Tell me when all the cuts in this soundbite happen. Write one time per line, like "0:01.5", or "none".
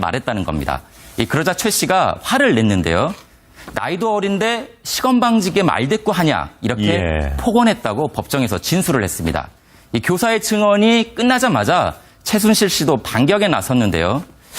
0:11.1